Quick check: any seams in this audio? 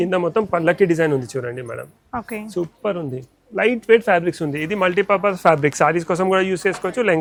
no; 0 cuts

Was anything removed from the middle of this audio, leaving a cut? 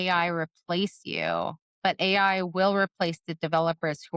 no; 0 cuts

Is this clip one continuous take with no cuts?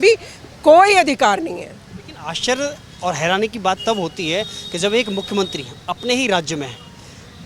yes; 0 cuts

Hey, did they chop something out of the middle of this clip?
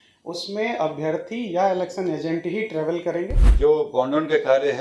yes; 1 cut; at 3.4 s

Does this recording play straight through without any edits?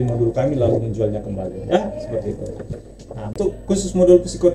no; 1 cut; at 3.4 s

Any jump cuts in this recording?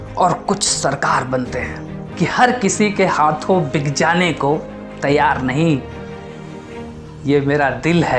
yes; 1 cut; at 2.0 s

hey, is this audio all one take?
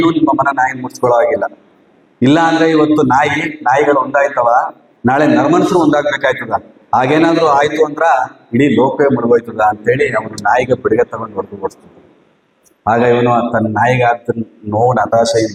yes; 0 cuts

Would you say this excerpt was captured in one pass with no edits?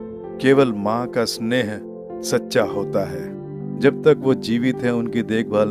no; 1 cut; at 3.7 s

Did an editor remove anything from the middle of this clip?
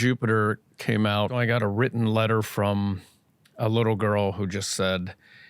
yes; 1 cut; at 1.3 s

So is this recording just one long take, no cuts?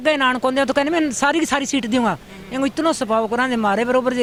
yes; 0 cuts

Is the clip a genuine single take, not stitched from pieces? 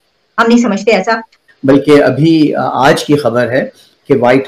no; 1 cut; at 1.4 s

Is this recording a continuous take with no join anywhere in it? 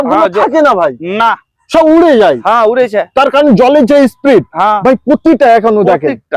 yes; 0 cuts

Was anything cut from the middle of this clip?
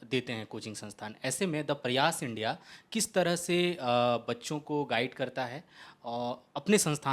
no; 0 cuts

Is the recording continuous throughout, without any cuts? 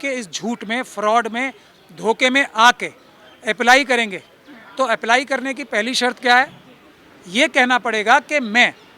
yes; 0 cuts

